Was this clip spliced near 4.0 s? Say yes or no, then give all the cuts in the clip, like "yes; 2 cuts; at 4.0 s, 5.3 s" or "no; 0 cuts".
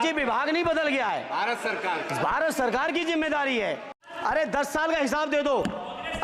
yes; 1 cut; at 4.0 s